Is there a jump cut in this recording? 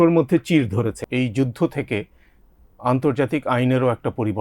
yes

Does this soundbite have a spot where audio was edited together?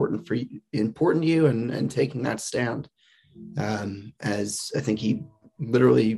no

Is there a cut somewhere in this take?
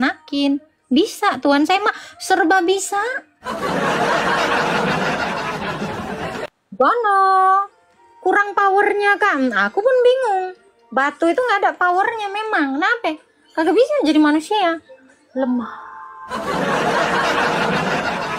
no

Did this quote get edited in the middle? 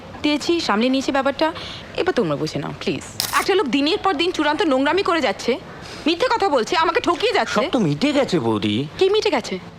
yes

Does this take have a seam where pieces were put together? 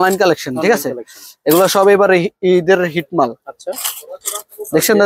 no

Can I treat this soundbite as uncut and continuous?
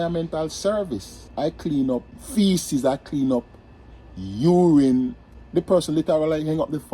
no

